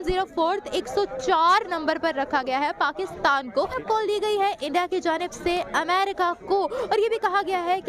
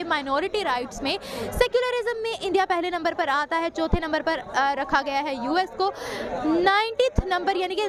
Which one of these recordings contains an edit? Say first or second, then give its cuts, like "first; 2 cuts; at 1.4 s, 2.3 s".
first; 1 cut; at 3.8 s